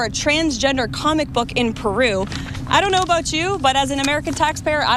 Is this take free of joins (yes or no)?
yes